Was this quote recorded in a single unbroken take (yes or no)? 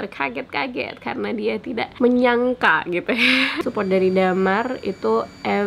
no